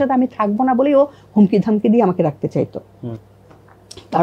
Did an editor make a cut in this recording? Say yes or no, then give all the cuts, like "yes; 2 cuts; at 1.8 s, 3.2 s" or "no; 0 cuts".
no; 0 cuts